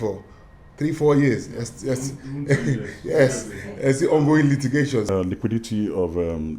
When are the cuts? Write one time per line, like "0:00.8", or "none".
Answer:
0:05.1